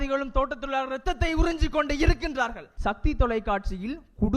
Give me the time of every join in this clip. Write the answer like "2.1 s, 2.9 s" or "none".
2.7 s

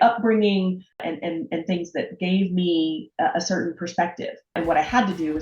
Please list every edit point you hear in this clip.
1.0 s, 4.5 s

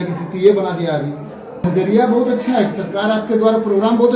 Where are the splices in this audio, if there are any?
1.6 s

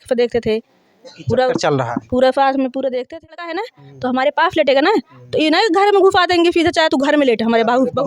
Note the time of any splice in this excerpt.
3.2 s

